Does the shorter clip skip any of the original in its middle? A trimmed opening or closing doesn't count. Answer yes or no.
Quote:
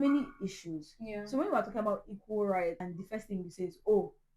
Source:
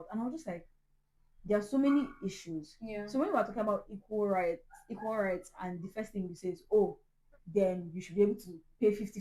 yes